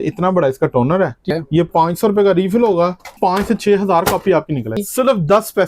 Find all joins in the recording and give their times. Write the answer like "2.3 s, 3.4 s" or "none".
1.3 s, 3.2 s, 4.8 s

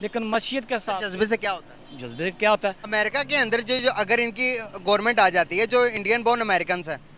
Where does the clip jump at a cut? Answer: 2.8 s

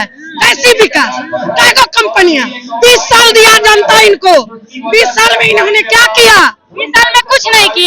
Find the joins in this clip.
none

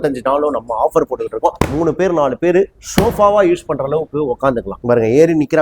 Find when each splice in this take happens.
1.6 s, 4.7 s

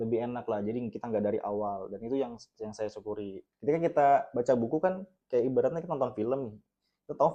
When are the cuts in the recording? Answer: 3.4 s

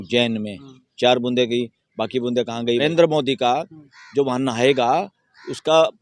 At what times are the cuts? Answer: 2.8 s

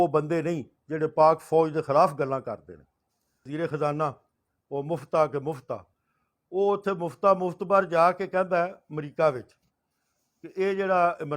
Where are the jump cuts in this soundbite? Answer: 3.4 s

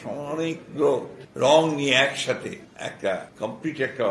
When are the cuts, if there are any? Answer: 1.2 s, 2.7 s, 3.3 s

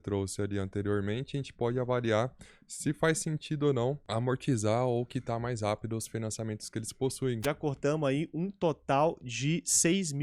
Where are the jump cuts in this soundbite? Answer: 4.0 s, 7.4 s

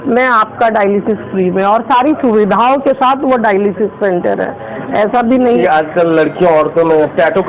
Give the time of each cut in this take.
5.6 s

